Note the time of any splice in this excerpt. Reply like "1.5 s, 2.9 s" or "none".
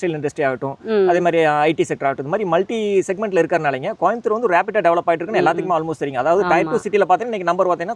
none